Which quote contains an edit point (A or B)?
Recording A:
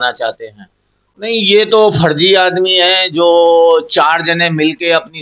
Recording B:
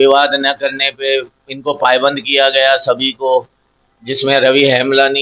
A